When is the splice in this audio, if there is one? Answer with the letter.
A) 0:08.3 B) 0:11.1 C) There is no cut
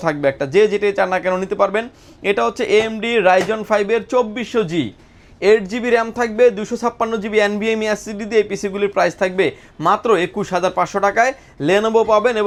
C